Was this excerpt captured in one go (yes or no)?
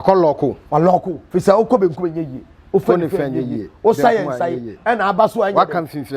no